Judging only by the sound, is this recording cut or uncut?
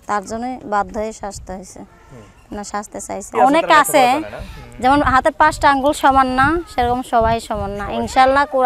cut